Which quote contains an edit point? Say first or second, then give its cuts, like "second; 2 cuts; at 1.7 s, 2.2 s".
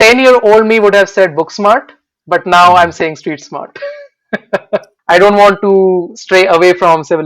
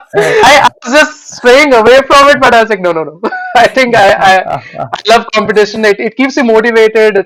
first; 1 cut; at 4.9 s